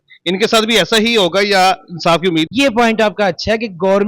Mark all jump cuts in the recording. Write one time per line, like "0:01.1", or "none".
0:02.5